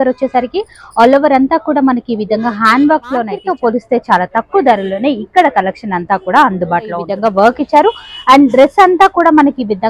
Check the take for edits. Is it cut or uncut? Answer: cut